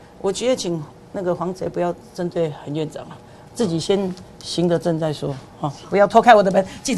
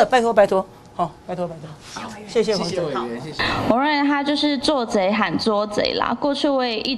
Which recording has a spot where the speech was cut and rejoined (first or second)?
second